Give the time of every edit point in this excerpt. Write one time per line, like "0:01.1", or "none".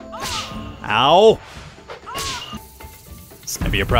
0:02.6